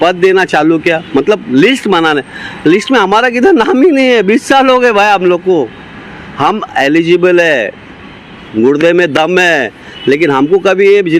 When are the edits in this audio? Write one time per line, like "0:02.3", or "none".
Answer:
none